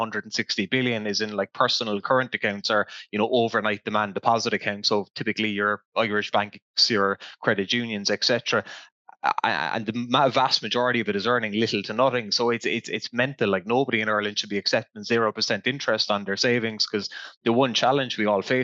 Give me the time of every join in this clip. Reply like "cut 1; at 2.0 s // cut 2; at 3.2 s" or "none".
none